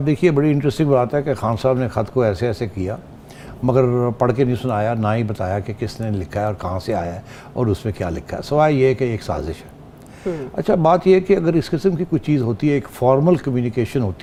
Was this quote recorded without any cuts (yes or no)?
yes